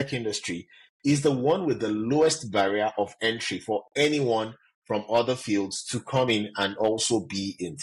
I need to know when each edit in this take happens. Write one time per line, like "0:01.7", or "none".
none